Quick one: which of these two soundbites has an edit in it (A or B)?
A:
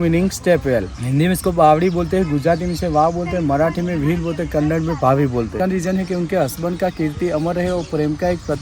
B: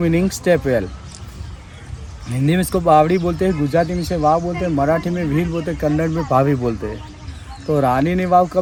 A